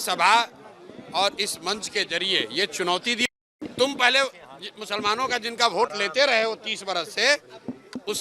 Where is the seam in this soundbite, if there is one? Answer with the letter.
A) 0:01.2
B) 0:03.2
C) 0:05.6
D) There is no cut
B